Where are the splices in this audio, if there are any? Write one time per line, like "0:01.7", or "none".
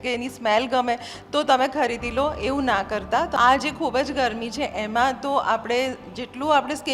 0:03.3